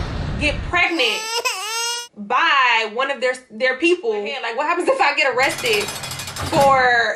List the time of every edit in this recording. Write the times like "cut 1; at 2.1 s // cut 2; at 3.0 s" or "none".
none